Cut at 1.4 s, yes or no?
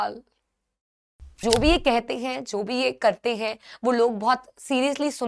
yes